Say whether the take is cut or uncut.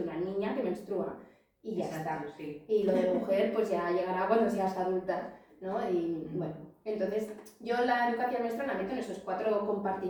uncut